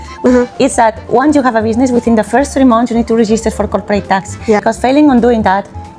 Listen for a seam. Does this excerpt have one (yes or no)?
yes